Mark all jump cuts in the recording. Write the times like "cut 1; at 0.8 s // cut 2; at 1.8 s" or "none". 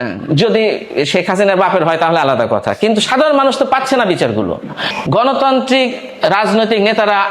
cut 1; at 4.9 s